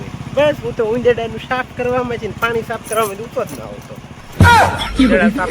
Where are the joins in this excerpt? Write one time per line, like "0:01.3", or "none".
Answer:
0:04.4